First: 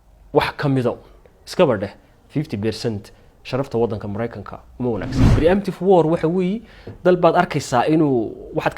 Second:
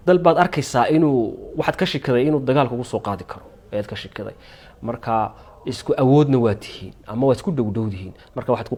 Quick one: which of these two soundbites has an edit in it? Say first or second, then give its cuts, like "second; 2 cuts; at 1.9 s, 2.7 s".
first; 1 cut; at 5.2 s